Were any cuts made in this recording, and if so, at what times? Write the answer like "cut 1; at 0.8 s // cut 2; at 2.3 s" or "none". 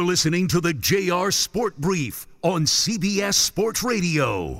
none